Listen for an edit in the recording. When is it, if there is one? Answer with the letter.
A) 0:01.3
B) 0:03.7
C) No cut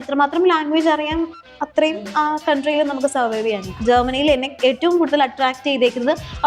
B